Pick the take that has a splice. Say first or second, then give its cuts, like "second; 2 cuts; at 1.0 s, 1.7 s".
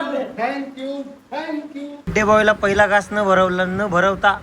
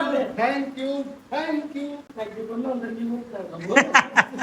first; 1 cut; at 2.1 s